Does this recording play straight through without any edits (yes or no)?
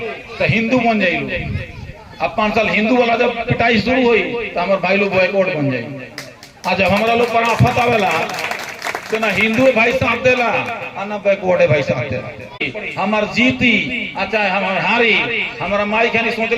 no